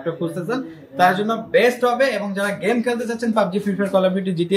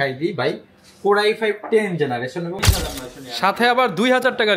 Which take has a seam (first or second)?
second